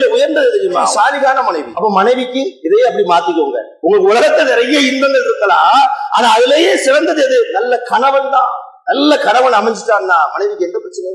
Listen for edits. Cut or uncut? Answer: cut